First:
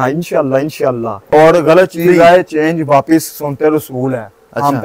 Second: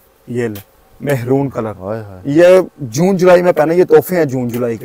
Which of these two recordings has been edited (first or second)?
first